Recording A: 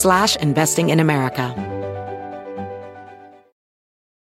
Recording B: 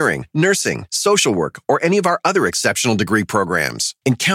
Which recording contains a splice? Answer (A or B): A